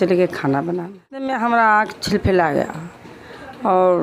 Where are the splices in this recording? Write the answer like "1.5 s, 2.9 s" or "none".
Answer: 1.3 s